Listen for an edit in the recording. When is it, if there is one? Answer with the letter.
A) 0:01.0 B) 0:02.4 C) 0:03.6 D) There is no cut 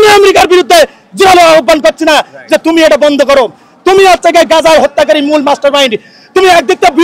D